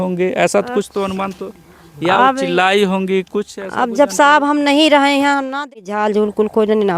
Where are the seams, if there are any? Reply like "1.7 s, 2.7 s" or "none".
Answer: 5.6 s

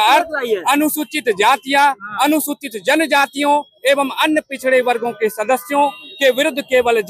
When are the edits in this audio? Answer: none

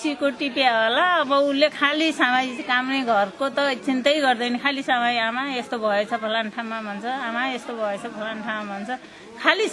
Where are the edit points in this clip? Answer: none

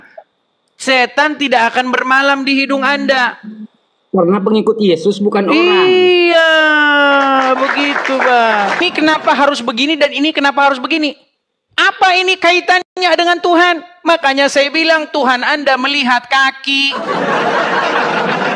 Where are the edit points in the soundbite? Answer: 8.8 s

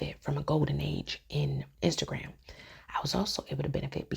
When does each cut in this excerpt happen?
1.7 s

